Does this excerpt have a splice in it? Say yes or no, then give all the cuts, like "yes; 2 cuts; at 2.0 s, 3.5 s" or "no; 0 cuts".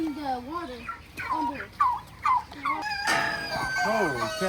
yes; 1 cut; at 2.8 s